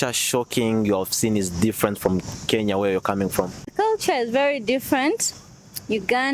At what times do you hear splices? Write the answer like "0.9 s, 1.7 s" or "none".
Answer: 3.7 s

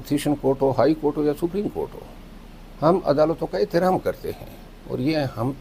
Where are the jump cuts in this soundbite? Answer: none

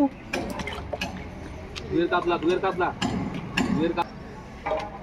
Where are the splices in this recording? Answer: 4.1 s

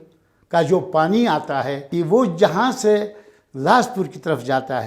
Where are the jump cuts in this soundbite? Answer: 1.8 s

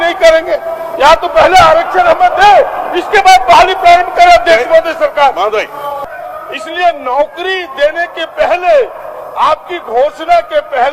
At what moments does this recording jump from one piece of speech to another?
6.1 s

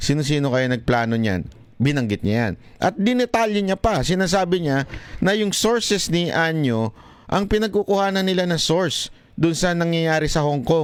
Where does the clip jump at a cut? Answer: none

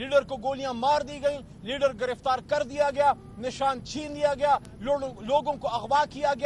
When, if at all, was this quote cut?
none

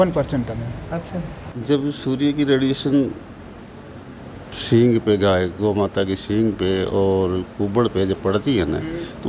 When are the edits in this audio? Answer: 1.5 s

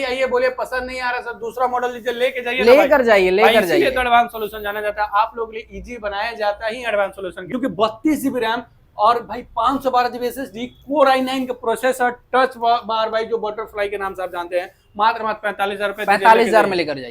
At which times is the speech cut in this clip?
7.4 s

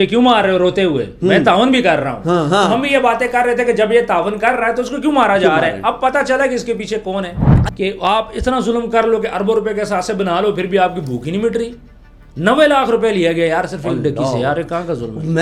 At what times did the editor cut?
7.5 s

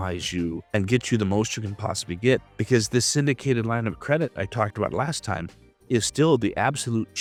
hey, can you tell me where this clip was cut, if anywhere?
none

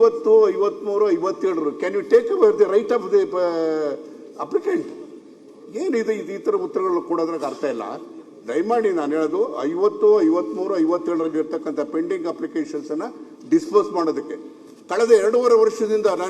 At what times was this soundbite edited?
none

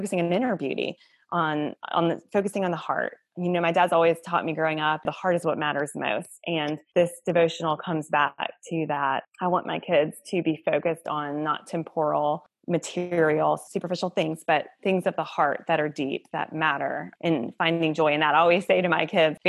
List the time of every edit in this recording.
5.0 s, 6.8 s

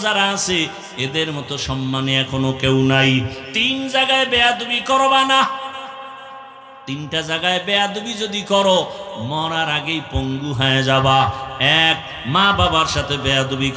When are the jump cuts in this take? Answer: 3.4 s

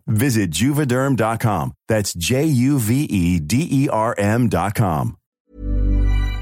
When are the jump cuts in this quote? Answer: 5.4 s

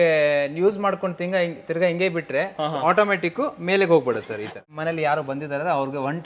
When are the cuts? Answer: 4.6 s

